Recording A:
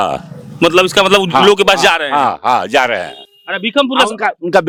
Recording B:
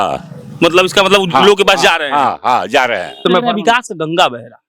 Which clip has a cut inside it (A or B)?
B